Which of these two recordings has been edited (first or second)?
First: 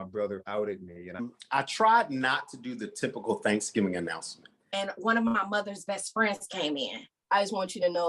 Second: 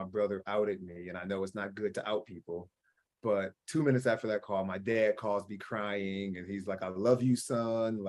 first